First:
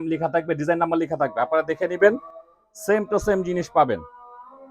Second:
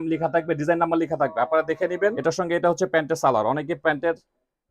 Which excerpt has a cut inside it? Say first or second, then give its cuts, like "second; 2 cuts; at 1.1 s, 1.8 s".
second; 1 cut; at 2.2 s